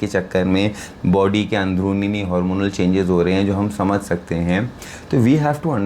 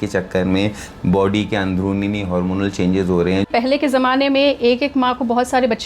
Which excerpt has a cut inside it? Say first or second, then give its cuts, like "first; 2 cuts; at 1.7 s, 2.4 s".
second; 1 cut; at 3.5 s